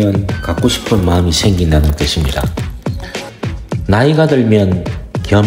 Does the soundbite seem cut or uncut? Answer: cut